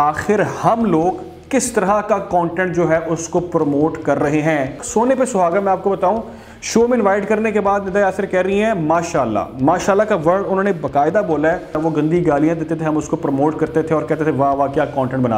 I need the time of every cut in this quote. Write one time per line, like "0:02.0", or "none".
0:04.8
0:11.8